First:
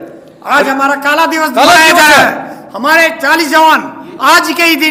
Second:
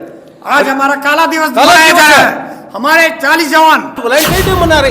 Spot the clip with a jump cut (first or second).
second